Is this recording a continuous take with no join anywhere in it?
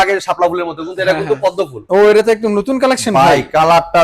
no; 1 cut; at 1.8 s

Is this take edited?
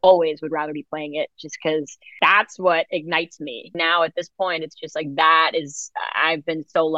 yes; 2 cuts; at 2.0 s, 3.7 s

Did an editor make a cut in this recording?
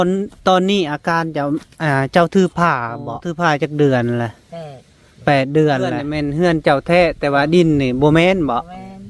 yes; 2 cuts; at 3.4 s, 6.1 s

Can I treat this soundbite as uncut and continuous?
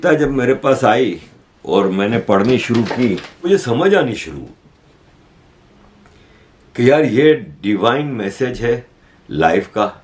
no; 1 cut; at 3.5 s

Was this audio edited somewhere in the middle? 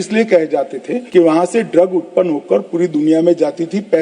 yes; 1 cut; at 0.9 s

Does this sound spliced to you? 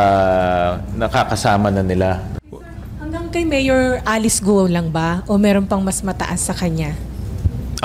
yes; 1 cut; at 2.3 s

